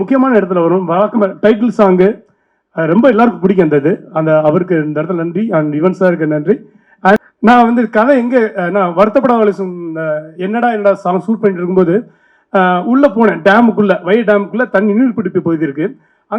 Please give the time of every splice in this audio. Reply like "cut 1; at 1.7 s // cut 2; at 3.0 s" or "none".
cut 1; at 7.2 s